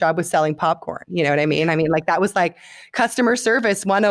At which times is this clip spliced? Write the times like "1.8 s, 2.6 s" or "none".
none